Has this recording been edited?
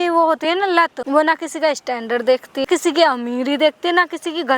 yes; 2 cuts; at 1.0 s, 2.6 s

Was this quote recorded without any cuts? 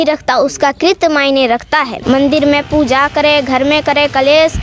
no; 1 cut; at 1.9 s

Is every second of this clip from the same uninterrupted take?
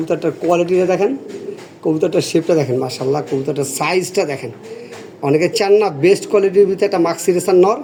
yes; 0 cuts

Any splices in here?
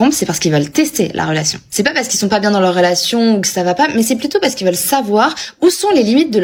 no; 0 cuts

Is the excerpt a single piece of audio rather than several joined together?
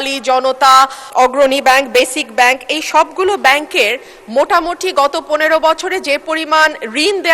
no; 1 cut; at 1.0 s

